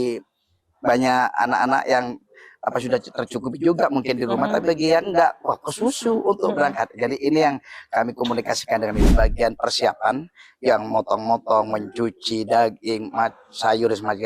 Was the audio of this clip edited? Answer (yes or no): yes